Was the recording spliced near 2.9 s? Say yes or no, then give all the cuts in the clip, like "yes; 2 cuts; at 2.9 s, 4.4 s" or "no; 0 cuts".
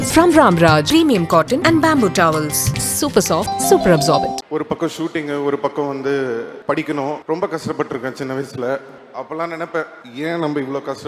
no; 5 cuts; at 4.4 s, 6.5 s, 7.2 s, 9.0 s, 10.0 s